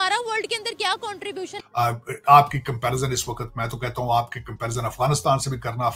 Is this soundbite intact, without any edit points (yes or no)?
no